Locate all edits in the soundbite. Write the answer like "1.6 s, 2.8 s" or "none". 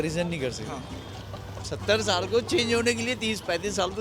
none